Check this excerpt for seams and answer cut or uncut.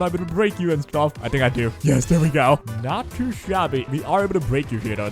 cut